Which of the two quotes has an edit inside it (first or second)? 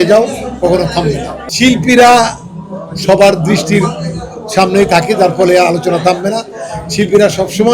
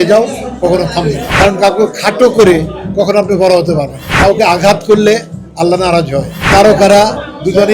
second